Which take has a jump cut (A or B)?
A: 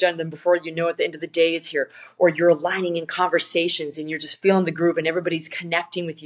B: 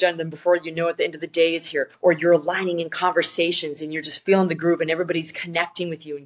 B